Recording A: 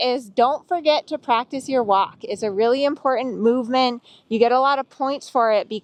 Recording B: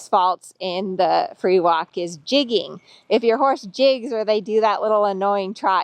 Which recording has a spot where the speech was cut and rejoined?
B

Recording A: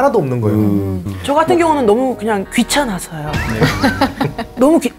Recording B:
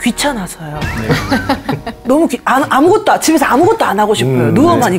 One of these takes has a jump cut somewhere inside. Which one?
A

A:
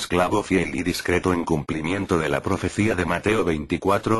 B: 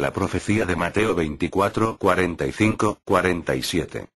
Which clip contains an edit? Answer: A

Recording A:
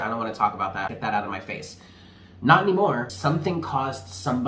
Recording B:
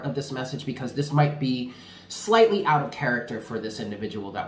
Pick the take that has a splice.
A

